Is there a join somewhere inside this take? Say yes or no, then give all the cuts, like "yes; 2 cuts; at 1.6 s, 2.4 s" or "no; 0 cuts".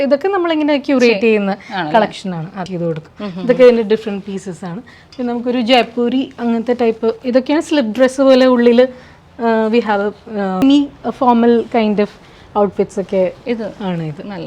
yes; 2 cuts; at 2.7 s, 10.6 s